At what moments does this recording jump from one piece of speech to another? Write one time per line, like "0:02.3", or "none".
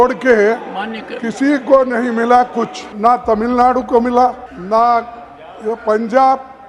0:02.8
0:04.5